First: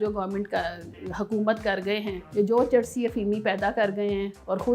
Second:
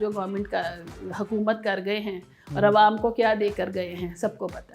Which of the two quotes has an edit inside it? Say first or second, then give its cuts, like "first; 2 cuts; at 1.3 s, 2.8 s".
first; 1 cut; at 2.2 s